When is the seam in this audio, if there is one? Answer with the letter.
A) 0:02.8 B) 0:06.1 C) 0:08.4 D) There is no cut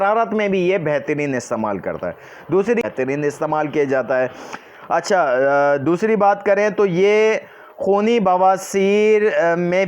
A